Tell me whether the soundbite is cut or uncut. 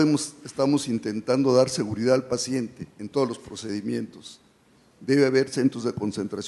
uncut